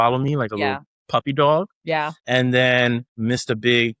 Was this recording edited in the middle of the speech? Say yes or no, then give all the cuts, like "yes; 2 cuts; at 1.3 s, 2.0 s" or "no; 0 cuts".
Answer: yes; 2 cuts; at 1.9 s, 3.1 s